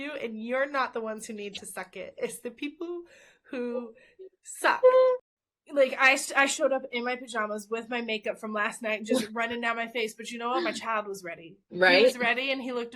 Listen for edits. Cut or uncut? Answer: cut